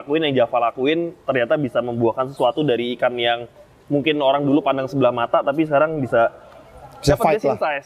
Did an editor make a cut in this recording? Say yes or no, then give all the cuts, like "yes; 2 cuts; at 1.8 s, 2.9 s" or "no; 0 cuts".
no; 0 cuts